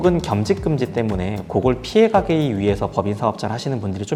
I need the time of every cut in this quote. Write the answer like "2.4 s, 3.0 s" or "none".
none